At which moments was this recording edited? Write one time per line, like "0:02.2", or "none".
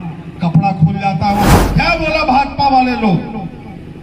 0:01.6